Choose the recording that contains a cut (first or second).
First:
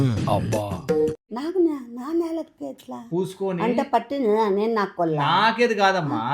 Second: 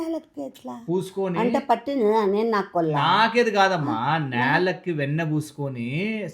first